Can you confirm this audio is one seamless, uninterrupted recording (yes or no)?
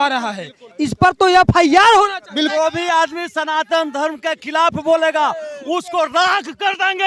no